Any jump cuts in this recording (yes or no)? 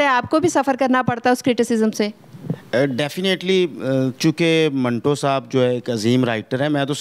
no